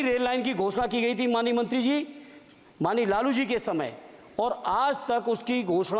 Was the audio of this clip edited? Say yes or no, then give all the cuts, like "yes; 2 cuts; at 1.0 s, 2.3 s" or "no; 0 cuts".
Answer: no; 0 cuts